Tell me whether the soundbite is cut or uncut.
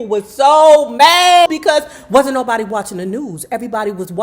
cut